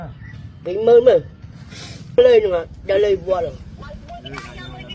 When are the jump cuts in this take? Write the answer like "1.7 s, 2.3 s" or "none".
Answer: 2.2 s